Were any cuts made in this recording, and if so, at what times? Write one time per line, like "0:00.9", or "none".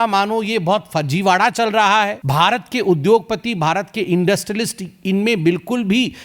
0:02.2